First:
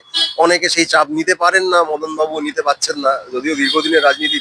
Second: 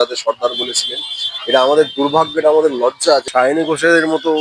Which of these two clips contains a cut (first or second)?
second